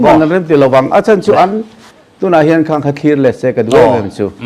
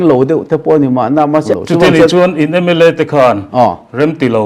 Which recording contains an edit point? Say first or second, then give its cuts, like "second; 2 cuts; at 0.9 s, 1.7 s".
second; 1 cut; at 1.5 s